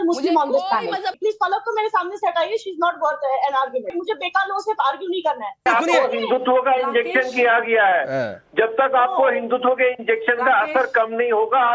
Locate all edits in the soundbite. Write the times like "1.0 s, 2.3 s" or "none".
1.1 s, 4.0 s, 5.7 s